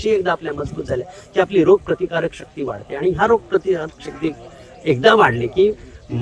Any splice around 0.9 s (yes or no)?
no